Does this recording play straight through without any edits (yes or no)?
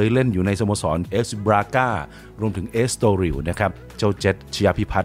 no